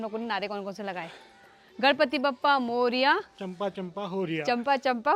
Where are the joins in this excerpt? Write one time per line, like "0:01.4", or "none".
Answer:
none

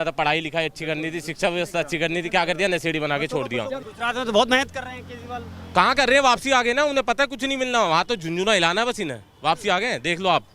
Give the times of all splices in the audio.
0:03.9

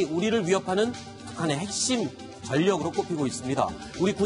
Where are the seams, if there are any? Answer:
none

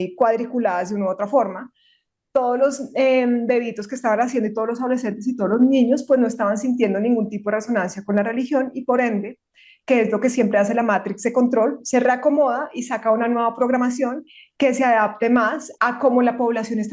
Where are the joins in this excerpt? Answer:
0:15.6

